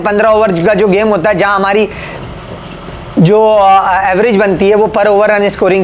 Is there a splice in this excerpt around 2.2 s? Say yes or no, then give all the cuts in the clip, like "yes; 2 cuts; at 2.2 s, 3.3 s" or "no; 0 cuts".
no; 0 cuts